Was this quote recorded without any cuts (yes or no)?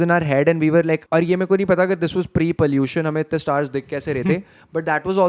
no